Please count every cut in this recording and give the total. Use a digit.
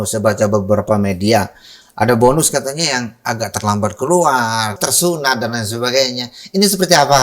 1